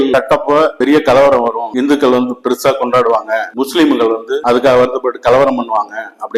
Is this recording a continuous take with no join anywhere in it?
yes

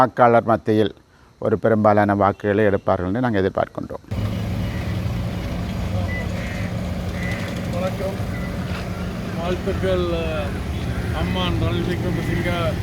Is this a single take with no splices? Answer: yes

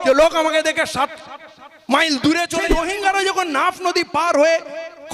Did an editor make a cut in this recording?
yes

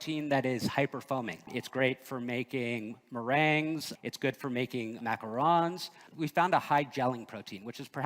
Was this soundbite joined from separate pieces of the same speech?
yes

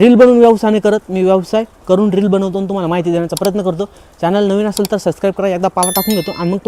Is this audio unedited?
yes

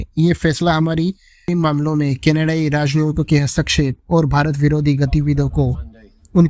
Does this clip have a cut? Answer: yes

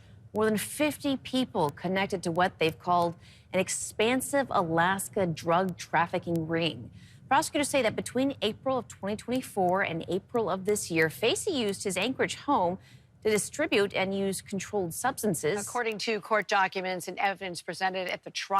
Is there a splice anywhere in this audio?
yes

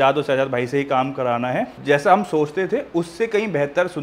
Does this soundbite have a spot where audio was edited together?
no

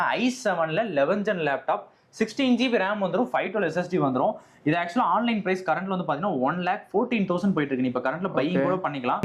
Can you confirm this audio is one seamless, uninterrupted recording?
yes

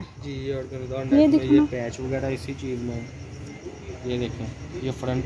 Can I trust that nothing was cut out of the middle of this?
yes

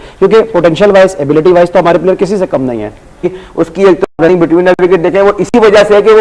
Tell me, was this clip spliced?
no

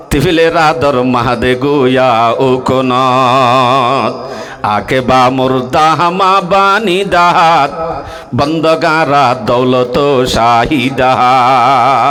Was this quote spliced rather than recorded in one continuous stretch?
no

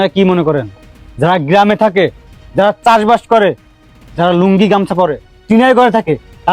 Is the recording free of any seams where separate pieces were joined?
yes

